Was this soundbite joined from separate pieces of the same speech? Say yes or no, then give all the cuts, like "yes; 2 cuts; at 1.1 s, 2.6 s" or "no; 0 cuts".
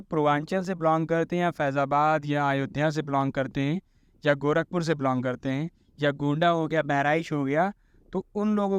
no; 0 cuts